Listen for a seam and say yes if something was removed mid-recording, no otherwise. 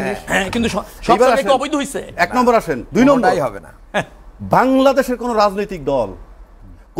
no